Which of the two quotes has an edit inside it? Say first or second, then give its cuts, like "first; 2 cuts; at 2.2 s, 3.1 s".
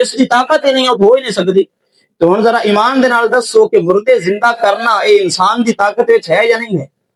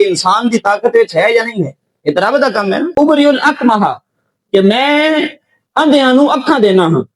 second; 1 cut; at 2.9 s